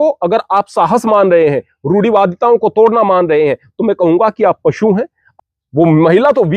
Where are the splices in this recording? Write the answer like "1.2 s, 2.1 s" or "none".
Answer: 5.3 s